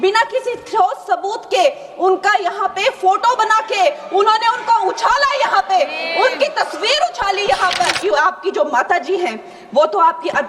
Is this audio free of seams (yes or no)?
no